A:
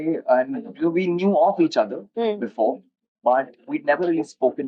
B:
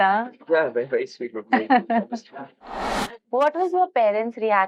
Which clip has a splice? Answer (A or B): B